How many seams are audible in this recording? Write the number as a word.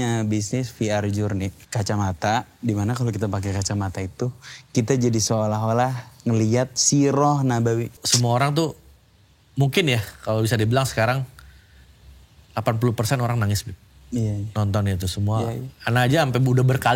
two